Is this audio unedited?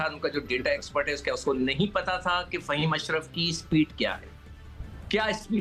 yes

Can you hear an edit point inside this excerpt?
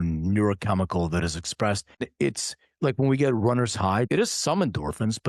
yes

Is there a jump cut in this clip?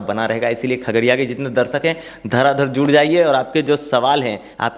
no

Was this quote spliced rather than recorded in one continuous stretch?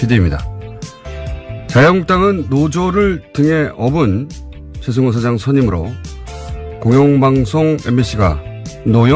no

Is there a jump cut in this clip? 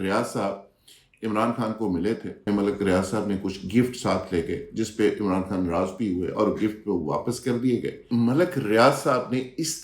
yes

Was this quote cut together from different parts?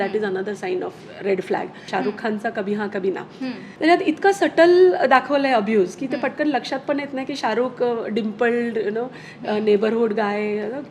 yes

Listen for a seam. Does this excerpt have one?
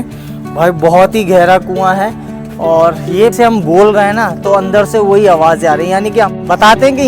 yes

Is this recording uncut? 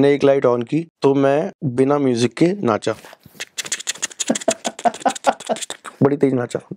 no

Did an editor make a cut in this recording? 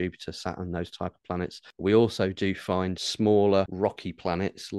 yes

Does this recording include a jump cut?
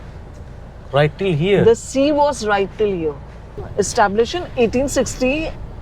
yes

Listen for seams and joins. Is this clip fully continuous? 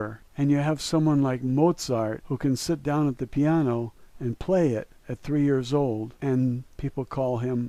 yes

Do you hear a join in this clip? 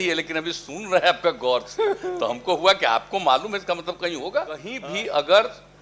yes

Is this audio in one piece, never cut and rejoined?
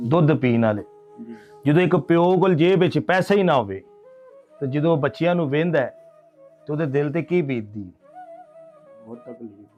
yes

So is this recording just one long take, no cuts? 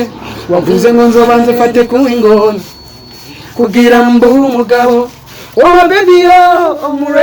yes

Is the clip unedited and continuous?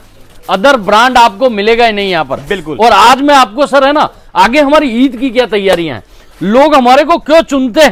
yes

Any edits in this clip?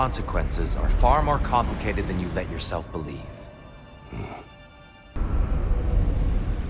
yes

